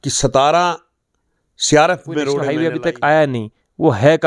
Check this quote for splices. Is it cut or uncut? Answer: cut